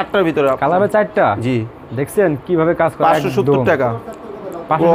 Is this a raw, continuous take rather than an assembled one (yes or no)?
yes